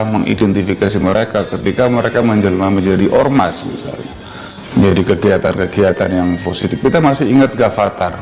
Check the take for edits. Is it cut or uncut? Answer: uncut